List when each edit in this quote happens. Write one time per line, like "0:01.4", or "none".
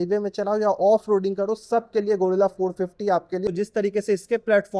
0:03.5